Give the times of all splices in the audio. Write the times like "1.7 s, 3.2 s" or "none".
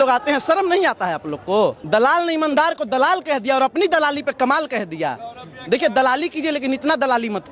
1.8 s